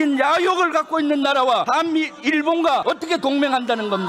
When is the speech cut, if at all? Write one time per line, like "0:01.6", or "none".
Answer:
0:01.7
0:02.8